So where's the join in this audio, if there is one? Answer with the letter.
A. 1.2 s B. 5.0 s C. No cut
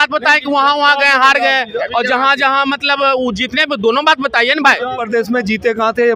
B